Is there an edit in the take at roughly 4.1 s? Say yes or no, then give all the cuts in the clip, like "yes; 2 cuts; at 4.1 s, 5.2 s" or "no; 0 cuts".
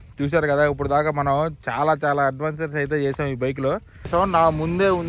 yes; 1 cut; at 4.1 s